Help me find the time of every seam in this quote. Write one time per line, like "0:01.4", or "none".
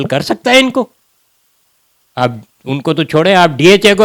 none